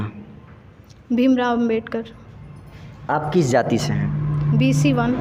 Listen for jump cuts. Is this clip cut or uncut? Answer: uncut